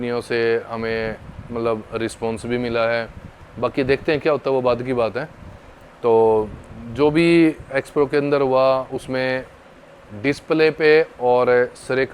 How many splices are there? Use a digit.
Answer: 0